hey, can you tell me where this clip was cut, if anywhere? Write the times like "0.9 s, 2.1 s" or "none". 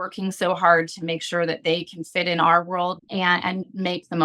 3.4 s